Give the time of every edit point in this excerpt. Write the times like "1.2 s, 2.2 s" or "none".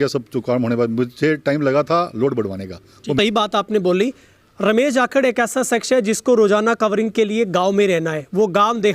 3.2 s